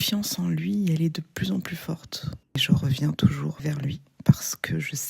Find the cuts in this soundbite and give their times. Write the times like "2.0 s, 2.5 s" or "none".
2.6 s, 3.6 s